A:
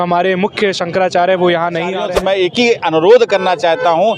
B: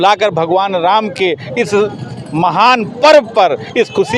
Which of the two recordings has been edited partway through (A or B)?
A